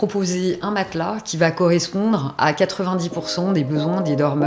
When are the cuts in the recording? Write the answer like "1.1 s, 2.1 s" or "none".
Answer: none